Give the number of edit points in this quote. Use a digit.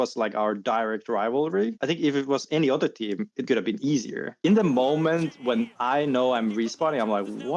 3